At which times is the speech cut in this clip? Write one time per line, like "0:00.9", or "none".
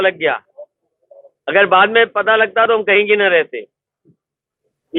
none